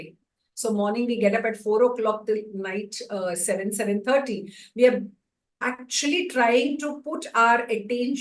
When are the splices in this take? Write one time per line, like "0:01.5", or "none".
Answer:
none